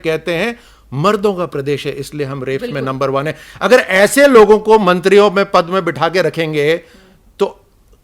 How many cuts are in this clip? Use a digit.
0